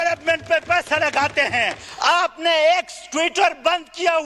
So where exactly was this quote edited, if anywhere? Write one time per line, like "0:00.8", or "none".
0:01.9